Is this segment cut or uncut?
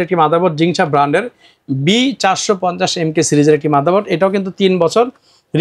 uncut